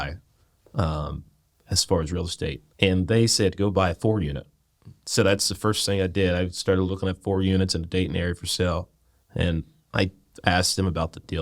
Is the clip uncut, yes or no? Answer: no